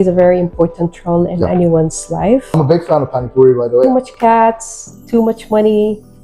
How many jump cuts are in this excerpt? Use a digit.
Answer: 2